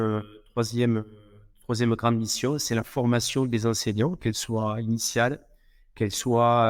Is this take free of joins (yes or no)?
yes